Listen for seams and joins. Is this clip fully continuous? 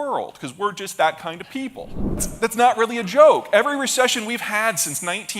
no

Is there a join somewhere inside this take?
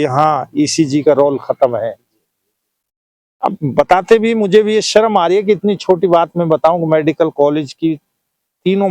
no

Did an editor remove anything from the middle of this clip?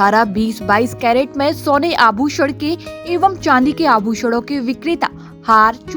no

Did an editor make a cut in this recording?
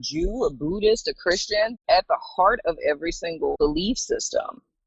yes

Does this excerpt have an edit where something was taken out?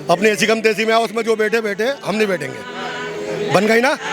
no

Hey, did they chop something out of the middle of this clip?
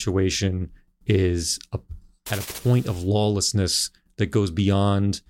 no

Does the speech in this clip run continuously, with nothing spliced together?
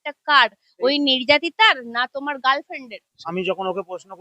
no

